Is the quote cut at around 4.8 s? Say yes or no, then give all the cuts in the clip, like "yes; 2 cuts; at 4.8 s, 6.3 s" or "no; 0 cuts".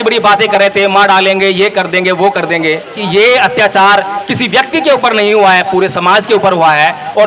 no; 1 cut; at 3.0 s